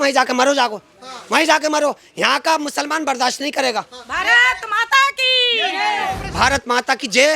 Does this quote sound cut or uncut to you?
cut